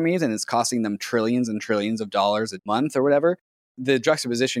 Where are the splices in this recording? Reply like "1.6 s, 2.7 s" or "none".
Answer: 2.6 s, 3.7 s